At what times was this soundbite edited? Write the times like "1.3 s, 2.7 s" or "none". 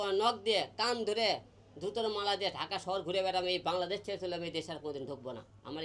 none

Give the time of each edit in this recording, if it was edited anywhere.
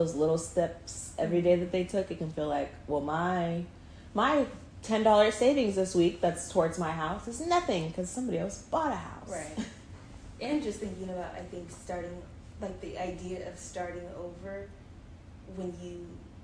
none

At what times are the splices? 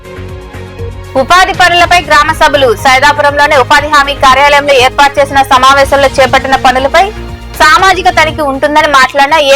1.1 s

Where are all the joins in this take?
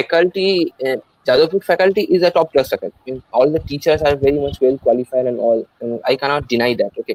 none

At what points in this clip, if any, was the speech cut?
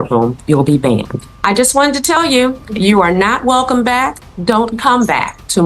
1.2 s

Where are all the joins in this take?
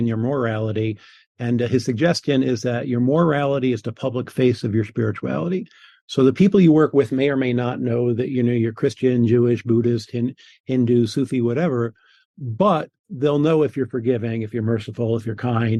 none

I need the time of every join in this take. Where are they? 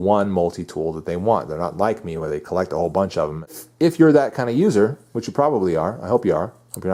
3.6 s

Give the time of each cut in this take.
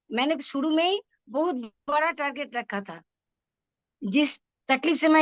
none

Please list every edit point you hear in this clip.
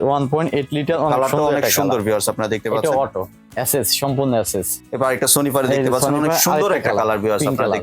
3.4 s, 4.8 s

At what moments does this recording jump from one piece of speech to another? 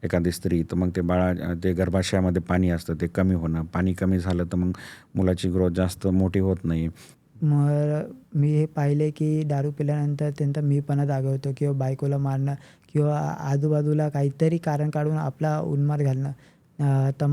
7.1 s

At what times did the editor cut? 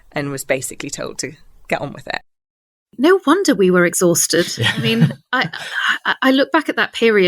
2.9 s

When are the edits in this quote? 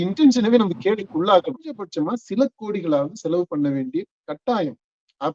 1.8 s

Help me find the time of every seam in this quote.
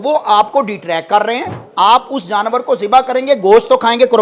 1.6 s

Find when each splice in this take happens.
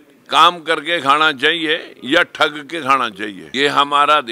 3.4 s

